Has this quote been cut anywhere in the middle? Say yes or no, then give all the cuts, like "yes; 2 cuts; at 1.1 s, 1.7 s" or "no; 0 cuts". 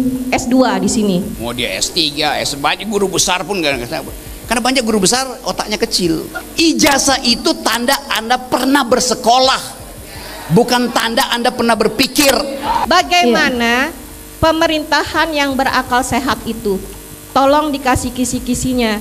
yes; 3 cuts; at 1.3 s, 6.4 s, 12.8 s